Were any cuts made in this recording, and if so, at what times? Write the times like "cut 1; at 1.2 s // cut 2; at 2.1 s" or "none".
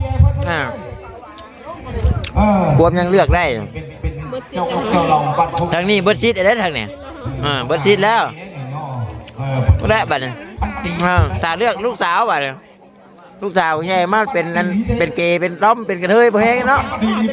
none